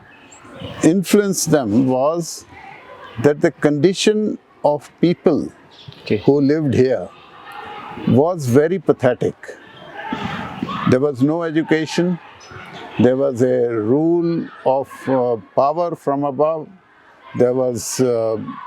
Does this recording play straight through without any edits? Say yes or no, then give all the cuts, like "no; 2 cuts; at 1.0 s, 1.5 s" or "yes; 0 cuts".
yes; 0 cuts